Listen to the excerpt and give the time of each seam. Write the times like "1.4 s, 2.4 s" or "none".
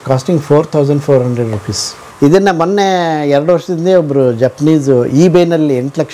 2.0 s